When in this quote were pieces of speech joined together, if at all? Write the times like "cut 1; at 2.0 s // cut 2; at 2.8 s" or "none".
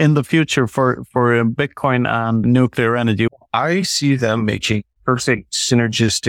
cut 1; at 2.4 s // cut 2; at 3.3 s // cut 3; at 5.4 s

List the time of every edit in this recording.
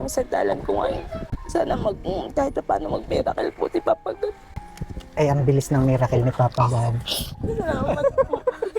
cut 1; at 1.2 s

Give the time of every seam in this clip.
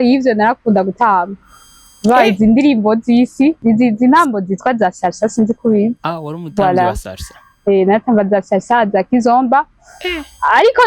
cut 1; at 3.6 s

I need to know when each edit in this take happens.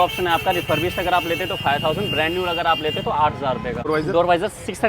cut 1; at 3.9 s

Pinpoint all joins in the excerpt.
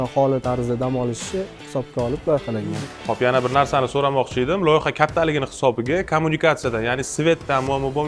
cut 1; at 2.6 s

